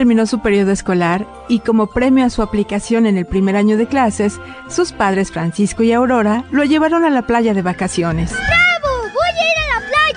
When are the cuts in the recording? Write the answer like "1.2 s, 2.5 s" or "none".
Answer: 8.4 s

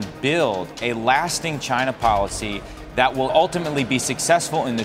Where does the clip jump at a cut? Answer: 3.3 s

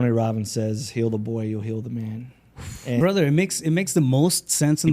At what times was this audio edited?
3.0 s

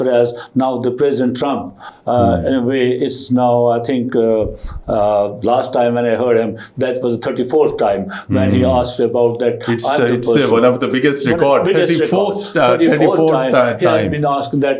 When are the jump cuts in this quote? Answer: none

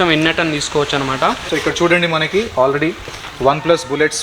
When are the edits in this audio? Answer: 1.5 s

